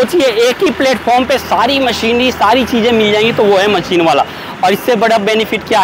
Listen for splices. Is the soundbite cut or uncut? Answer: uncut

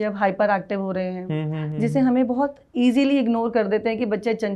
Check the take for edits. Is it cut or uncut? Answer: uncut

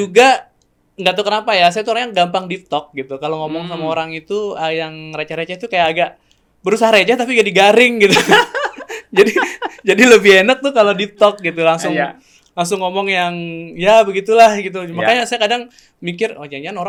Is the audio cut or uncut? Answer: uncut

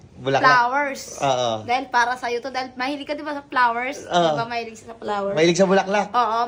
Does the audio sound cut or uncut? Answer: uncut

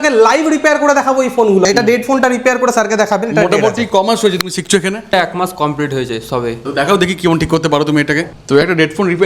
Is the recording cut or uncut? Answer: cut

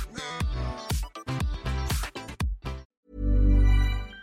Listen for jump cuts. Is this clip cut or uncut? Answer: cut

